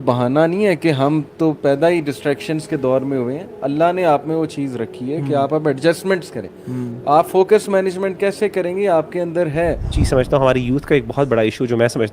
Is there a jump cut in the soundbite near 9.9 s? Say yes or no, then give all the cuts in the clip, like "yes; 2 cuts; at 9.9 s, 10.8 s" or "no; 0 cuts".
yes; 1 cut; at 9.9 s